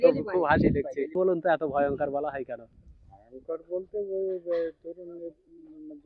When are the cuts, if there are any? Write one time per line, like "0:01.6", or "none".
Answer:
0:01.1